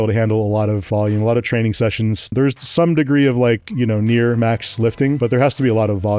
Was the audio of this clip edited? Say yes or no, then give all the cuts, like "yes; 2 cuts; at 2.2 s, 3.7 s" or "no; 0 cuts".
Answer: yes; 3 cuts; at 0.8 s, 2.3 s, 5.2 s